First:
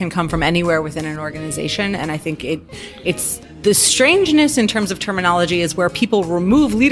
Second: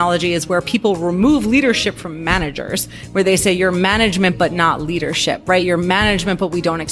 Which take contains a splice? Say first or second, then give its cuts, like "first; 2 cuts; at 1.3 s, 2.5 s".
first; 1 cut; at 3.6 s